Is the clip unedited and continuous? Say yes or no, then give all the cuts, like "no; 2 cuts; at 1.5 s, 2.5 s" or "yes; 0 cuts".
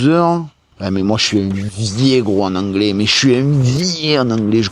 yes; 0 cuts